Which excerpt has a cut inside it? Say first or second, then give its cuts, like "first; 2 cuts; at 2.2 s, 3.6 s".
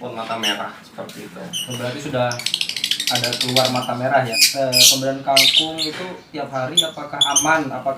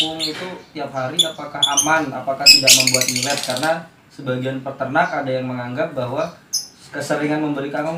first; 1 cut; at 4.4 s